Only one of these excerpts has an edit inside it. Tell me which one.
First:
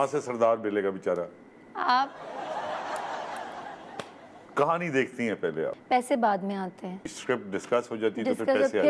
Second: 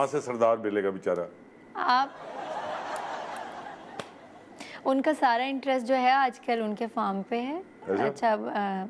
first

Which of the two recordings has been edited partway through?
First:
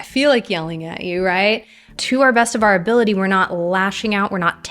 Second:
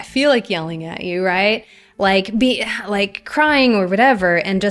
first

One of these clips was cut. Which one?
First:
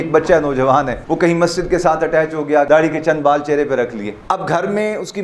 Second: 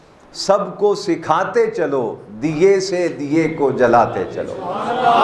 first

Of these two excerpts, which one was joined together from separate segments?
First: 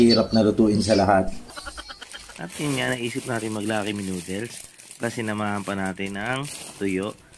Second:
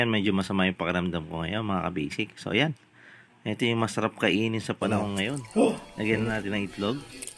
first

